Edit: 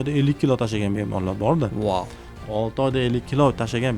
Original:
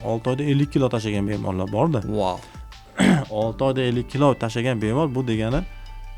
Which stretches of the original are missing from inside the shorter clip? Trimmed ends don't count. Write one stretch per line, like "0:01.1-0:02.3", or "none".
0:02.8-0:03.3